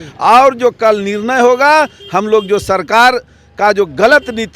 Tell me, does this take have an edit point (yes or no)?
no